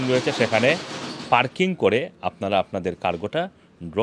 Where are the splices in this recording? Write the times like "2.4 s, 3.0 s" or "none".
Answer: none